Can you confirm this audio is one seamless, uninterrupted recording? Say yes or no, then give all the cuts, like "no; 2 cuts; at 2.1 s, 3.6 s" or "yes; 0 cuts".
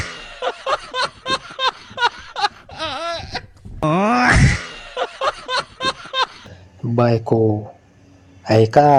yes; 0 cuts